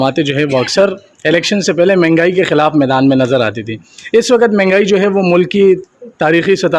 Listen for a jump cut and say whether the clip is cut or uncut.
uncut